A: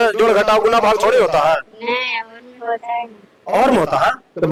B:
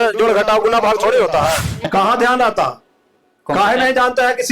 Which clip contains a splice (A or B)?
B